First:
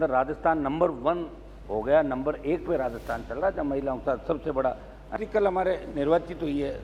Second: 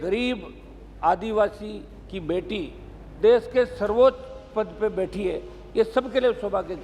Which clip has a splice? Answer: first; 1 cut; at 5.1 s

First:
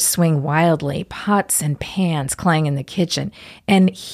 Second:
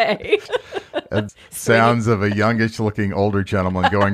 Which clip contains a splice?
second; 1 cut; at 1.4 s

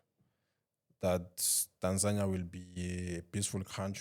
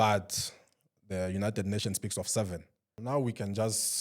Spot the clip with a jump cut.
second; 1 cut; at 3.0 s

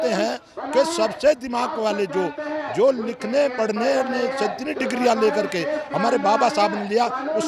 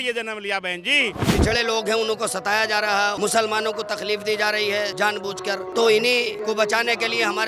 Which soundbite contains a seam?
second; 4 cuts; at 1.2 s, 3.1 s, 5.1 s, 6.4 s

